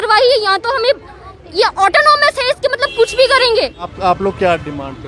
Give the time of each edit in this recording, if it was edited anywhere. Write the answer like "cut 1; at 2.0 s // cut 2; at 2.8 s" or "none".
cut 1; at 3.9 s